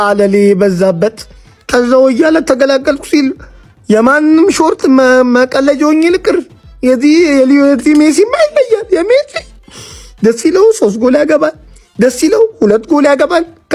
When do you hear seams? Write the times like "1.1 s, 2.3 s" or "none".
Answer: none